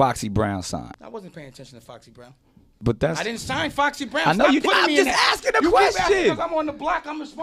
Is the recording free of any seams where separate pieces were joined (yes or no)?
no